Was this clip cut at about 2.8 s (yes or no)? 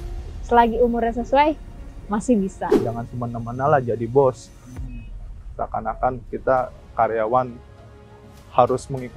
yes